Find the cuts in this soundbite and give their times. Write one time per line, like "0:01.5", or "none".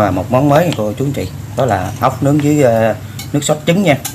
none